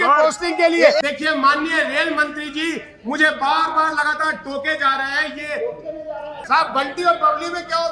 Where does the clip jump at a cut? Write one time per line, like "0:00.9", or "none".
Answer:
0:01.0
0:06.3